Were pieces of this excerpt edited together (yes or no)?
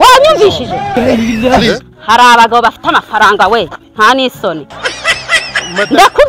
no